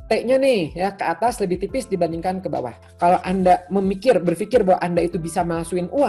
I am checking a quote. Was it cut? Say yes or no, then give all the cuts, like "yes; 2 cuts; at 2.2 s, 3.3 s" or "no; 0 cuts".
yes; 1 cut; at 2.8 s